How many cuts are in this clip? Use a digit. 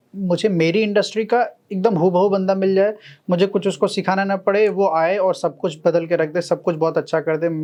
0